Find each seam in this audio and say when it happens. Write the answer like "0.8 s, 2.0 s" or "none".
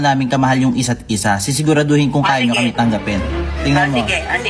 none